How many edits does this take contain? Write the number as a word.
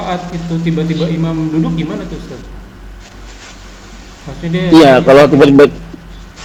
zero